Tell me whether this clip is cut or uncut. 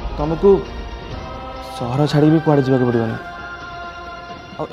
uncut